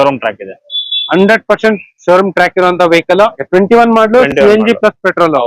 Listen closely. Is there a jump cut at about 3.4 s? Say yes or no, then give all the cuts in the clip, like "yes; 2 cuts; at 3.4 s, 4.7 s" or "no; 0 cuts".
yes; 1 cut; at 3.4 s